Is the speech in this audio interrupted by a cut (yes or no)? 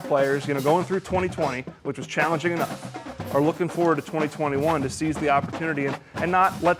no